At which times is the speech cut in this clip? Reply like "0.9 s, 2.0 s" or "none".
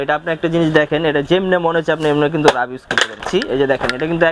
3.2 s

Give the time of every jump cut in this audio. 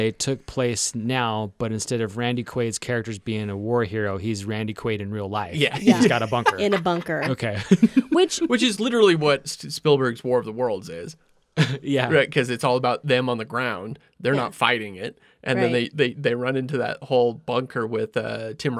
9.6 s

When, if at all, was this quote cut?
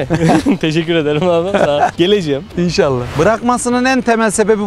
3.1 s

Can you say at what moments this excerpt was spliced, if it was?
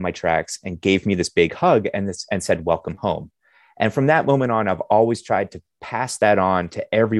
none

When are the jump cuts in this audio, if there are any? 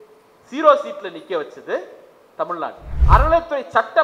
2.9 s

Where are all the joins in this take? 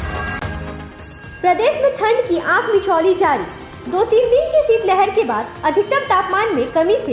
0.9 s

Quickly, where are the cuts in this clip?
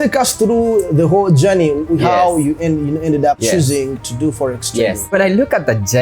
3.4 s, 5.1 s

